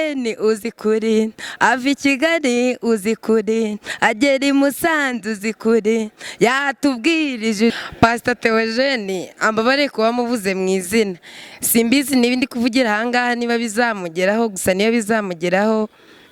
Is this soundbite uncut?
no; 1 cut; at 7.8 s

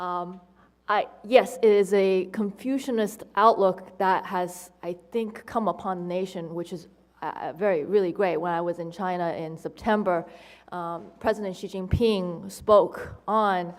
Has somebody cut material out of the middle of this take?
no; 0 cuts

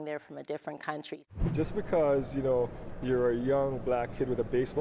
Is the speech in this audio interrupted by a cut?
yes; 1 cut; at 1.3 s

